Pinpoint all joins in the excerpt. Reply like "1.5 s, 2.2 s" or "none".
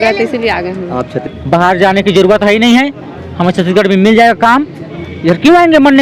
1.2 s